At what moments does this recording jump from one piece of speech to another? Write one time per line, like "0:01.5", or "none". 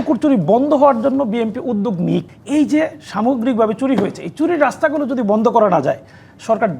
0:02.4